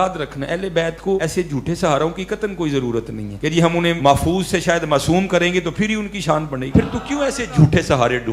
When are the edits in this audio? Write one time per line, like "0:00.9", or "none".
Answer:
0:01.2
0:03.7
0:06.6

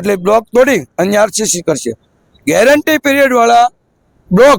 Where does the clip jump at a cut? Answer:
none

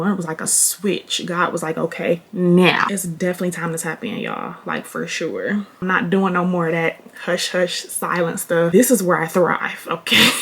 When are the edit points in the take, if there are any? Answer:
0:02.9
0:05.8

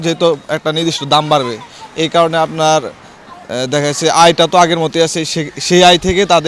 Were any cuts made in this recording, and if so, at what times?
none

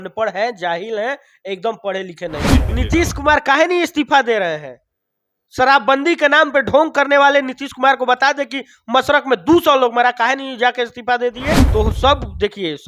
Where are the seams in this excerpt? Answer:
0:02.6
0:11.6

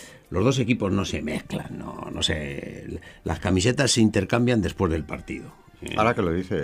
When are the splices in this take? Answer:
0:04.3

